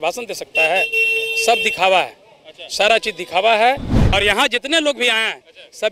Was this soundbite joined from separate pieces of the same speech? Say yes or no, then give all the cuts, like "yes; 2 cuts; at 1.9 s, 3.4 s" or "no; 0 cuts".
yes; 1 cut; at 4.0 s